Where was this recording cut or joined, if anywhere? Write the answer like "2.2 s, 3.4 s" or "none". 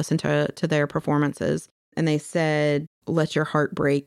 1.9 s, 2.9 s